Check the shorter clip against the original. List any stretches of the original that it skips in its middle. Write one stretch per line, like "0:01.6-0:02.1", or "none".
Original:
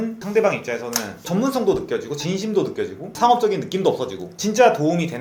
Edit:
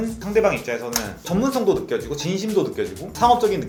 none

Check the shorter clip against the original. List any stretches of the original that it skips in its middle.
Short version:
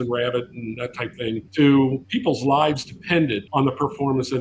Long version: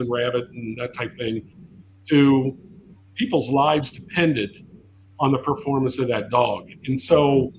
0:01.5-0:02.0
0:02.6-0:03.1
0:04.5-0:05.1

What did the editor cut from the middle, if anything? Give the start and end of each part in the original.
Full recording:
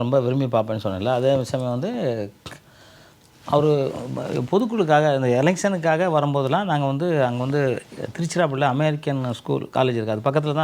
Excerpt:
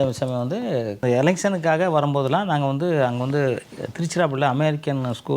0:02.3-0:05.2

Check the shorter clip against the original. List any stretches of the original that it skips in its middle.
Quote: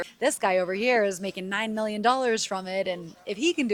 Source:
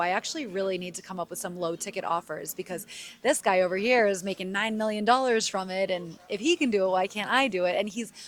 none

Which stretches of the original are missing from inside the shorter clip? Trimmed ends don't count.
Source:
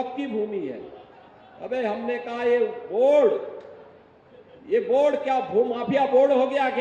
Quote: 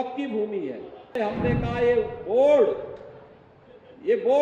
0:01.2-0:01.8

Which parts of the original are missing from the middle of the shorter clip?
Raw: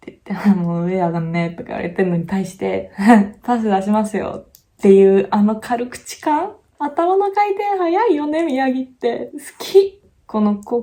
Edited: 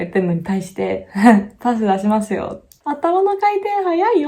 0:04.5-0:06.6

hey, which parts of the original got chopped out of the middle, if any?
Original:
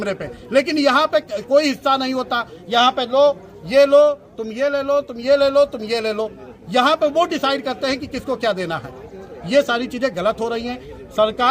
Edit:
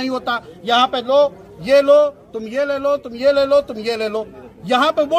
none

